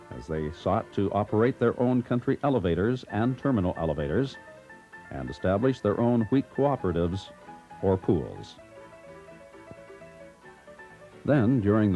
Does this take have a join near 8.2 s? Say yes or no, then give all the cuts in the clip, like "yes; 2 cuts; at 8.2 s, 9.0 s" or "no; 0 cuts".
no; 1 cut; at 7.0 s